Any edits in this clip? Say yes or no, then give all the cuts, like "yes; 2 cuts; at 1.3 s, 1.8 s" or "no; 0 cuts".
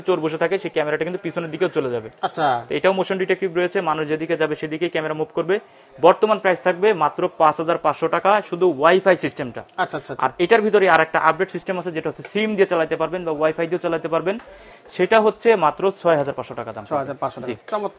no; 0 cuts